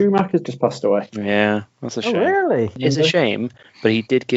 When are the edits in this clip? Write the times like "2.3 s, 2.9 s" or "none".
2.8 s

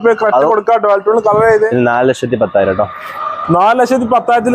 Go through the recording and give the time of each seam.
1.7 s

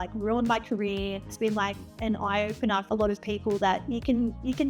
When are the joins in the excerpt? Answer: 1.3 s, 2.8 s

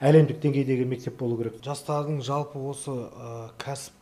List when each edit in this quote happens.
1.6 s

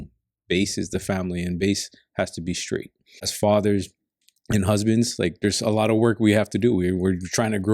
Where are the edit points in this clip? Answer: 3.3 s

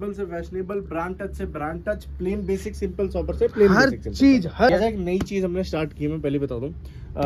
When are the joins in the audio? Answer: 4.7 s

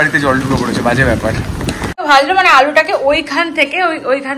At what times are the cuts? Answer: 2.0 s

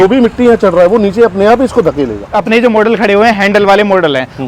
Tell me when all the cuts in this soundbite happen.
2.2 s

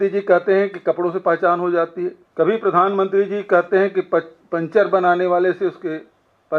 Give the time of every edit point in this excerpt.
2.2 s

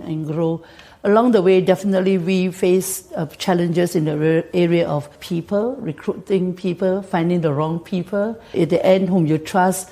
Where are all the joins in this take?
5.2 s, 8.4 s

